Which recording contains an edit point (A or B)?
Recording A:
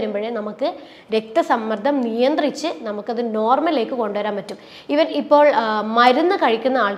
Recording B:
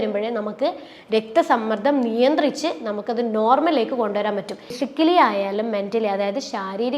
B